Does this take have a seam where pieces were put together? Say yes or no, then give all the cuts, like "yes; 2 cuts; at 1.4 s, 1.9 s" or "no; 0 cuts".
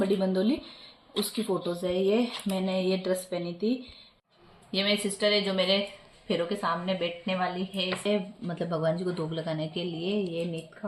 yes; 2 cuts; at 4.2 s, 8.1 s